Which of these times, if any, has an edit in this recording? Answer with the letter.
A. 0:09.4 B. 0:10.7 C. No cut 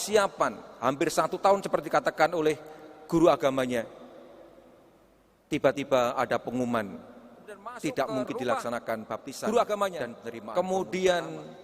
A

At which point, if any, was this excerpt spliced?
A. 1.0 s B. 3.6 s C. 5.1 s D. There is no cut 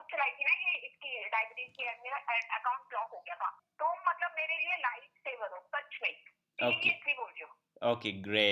B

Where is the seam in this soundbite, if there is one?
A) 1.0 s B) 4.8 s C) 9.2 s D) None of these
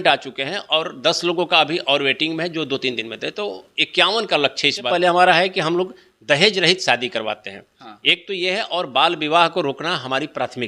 B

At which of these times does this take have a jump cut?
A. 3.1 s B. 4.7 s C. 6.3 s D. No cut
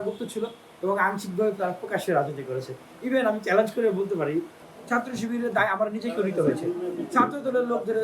B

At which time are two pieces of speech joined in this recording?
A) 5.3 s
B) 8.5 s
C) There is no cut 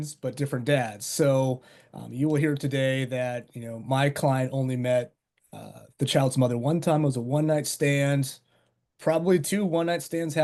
C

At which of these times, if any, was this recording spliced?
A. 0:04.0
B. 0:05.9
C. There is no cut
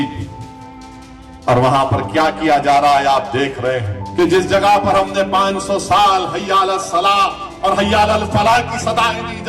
A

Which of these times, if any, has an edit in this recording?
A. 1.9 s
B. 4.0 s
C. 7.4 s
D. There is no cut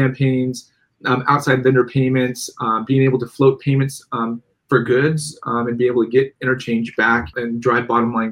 C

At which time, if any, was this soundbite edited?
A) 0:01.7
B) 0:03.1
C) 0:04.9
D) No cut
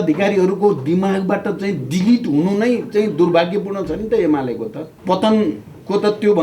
C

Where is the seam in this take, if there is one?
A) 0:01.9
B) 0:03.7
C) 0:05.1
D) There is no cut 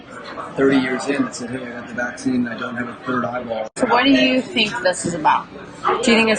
B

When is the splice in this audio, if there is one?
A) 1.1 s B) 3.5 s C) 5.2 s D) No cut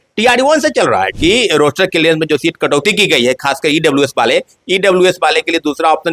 A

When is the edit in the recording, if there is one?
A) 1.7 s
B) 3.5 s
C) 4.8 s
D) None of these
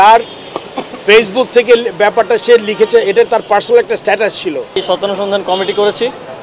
C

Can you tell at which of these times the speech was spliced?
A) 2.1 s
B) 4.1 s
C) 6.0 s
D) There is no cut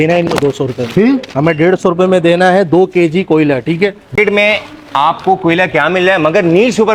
D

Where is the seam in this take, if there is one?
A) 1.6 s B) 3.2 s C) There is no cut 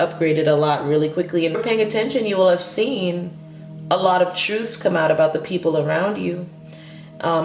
A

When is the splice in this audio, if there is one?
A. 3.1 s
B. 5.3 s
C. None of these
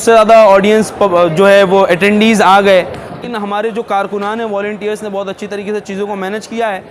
A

